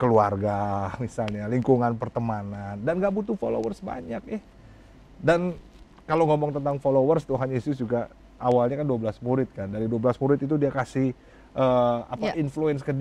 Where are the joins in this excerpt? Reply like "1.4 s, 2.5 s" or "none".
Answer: none